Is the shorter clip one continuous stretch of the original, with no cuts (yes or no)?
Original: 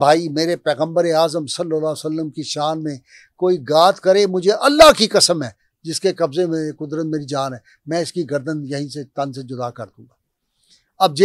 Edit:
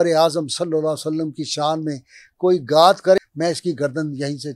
no